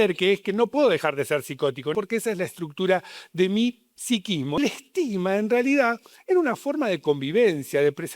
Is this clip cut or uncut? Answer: cut